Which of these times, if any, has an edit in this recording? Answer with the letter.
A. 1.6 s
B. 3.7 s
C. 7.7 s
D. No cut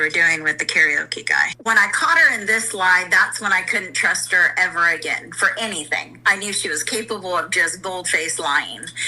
A